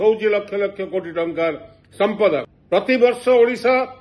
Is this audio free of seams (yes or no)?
no